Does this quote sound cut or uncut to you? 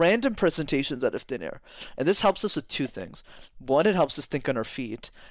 uncut